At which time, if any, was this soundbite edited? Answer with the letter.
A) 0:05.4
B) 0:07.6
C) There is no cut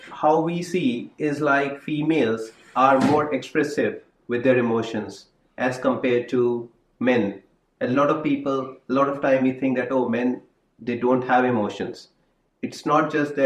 C